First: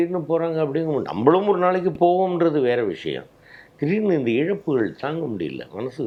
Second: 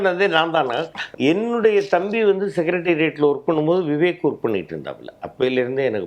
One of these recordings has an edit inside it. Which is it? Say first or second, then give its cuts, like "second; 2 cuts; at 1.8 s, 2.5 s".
second; 1 cut; at 1.1 s